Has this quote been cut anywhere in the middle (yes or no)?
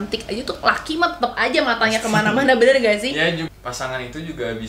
yes